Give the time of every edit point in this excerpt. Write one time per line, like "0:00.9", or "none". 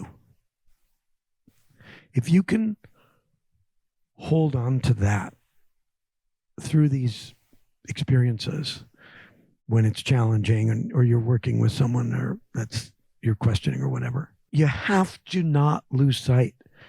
0:14.3